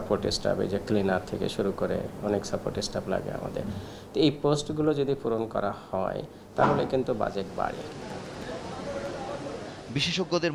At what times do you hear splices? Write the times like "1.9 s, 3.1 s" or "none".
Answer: none